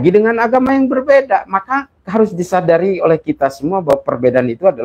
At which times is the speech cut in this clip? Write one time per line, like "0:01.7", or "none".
0:02.0